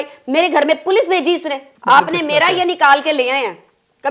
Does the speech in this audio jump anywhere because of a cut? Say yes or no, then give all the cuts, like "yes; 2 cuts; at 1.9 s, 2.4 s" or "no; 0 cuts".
no; 0 cuts